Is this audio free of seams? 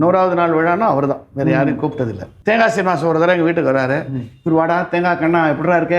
no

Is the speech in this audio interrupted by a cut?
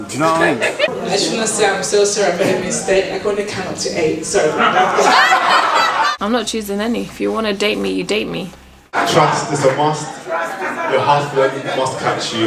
yes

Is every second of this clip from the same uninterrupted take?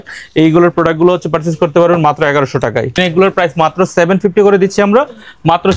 no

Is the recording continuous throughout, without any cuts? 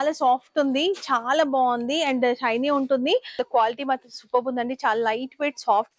no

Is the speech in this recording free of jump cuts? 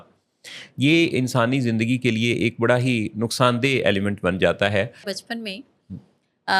no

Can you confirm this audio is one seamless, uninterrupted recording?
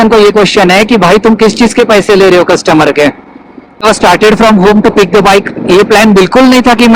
no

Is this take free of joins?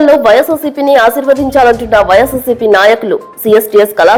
yes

